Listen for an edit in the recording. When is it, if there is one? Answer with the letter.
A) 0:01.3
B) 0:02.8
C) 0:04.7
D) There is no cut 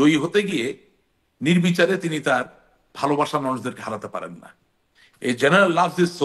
D